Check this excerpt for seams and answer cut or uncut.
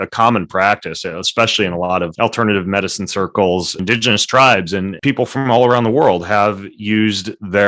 cut